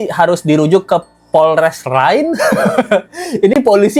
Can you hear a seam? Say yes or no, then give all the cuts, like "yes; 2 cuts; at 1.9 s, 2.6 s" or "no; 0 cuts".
no; 0 cuts